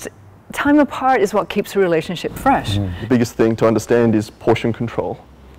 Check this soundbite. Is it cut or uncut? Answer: cut